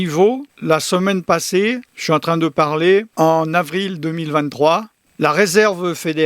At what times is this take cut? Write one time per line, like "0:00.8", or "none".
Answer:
0:05.0